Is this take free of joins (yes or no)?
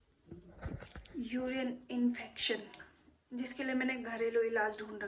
yes